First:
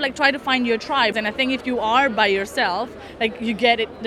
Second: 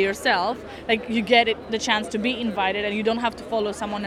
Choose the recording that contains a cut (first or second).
first